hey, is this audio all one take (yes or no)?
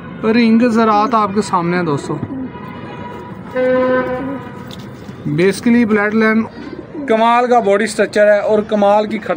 no